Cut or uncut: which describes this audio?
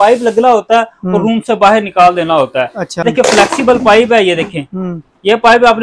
cut